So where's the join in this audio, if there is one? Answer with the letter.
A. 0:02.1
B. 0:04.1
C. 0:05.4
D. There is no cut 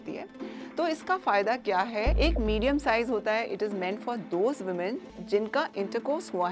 A